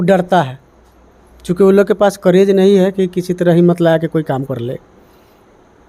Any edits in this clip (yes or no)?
no